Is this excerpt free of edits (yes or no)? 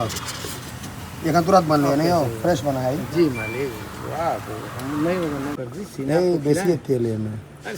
no